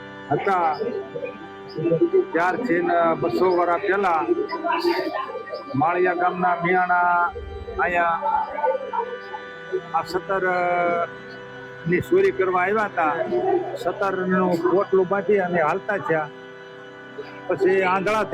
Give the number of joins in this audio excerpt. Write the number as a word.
one